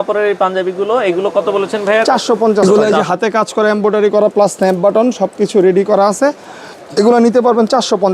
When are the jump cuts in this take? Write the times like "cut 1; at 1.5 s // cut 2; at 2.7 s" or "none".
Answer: cut 1; at 2.6 s